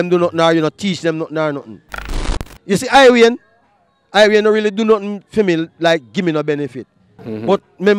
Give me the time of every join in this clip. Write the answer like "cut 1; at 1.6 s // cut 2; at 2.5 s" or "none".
cut 1; at 2.2 s